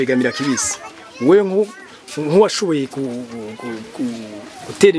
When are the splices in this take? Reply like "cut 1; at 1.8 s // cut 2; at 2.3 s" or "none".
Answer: none